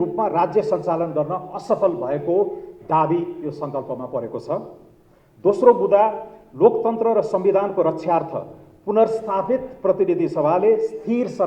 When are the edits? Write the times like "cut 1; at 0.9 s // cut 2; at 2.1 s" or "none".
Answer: none